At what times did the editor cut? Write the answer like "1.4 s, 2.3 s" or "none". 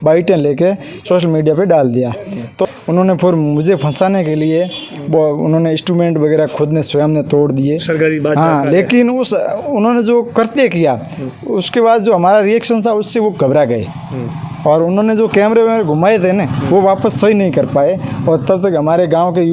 2.7 s